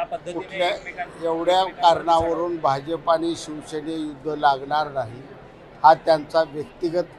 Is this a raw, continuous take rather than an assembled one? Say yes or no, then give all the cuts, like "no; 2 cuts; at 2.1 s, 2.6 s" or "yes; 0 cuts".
yes; 0 cuts